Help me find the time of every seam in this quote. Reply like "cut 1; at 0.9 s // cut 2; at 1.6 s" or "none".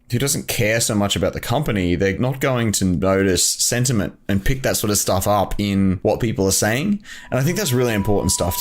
cut 1; at 2.2 s // cut 2; at 6.0 s